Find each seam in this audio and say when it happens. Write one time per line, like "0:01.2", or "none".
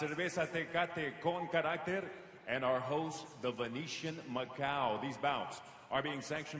none